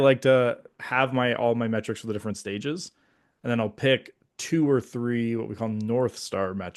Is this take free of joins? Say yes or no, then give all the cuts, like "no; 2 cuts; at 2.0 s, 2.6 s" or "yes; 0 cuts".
yes; 0 cuts